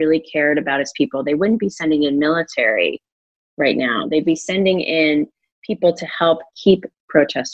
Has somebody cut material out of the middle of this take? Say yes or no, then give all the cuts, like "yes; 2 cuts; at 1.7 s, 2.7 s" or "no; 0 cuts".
no; 0 cuts